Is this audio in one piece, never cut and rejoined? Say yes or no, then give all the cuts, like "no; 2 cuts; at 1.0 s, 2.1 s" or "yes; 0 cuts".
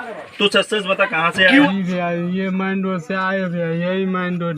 no; 1 cut; at 1.7 s